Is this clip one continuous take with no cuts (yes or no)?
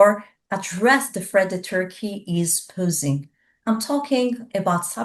yes